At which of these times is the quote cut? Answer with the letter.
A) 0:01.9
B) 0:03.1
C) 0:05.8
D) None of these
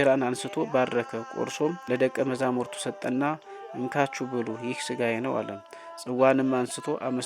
A